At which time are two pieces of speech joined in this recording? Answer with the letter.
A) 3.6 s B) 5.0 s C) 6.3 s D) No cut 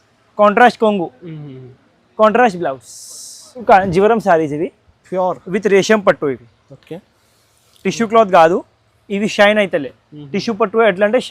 A